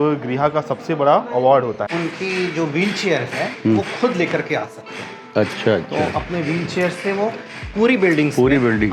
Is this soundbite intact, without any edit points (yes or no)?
no